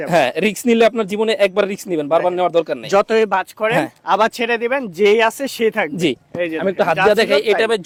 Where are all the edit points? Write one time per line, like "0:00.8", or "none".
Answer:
none